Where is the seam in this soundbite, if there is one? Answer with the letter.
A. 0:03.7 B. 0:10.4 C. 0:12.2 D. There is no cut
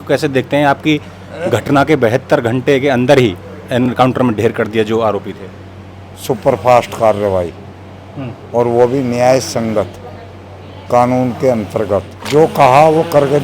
C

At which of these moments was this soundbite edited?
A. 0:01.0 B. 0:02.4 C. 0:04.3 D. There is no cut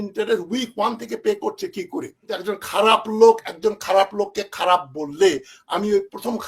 B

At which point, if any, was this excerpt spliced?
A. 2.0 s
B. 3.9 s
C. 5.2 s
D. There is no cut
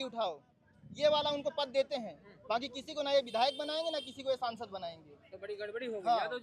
D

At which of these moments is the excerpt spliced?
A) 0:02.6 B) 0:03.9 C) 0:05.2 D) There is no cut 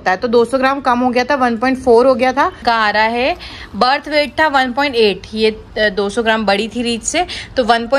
A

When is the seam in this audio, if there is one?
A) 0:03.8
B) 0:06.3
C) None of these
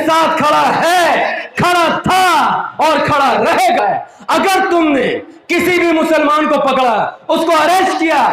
A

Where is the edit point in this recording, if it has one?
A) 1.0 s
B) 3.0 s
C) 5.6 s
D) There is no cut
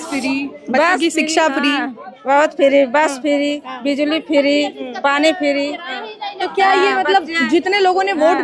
D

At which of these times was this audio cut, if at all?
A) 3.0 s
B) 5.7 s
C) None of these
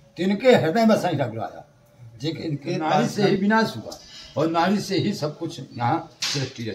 A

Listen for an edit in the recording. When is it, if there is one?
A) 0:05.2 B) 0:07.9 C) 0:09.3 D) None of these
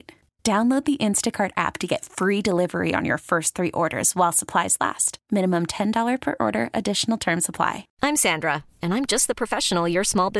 B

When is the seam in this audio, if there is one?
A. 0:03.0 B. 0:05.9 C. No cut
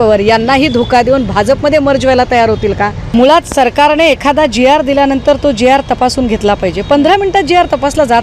A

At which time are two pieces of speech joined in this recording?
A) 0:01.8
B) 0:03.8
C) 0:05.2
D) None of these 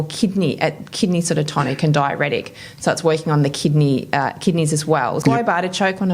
C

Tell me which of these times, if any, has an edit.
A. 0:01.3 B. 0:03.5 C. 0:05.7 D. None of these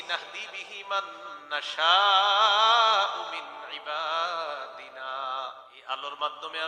C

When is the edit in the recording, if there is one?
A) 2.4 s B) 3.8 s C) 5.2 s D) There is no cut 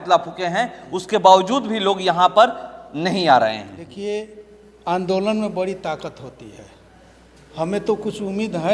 B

